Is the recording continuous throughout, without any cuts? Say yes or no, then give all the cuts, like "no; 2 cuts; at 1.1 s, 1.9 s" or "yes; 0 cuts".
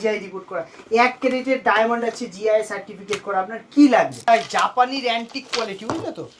no; 1 cut; at 4.1 s